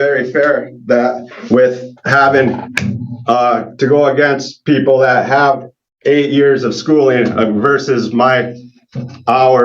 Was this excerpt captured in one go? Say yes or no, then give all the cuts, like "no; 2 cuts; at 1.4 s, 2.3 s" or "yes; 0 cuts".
yes; 0 cuts